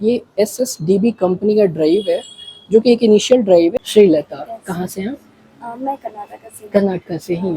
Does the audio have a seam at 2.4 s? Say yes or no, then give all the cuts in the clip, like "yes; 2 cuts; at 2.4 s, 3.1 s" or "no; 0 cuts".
no; 1 cut; at 3.8 s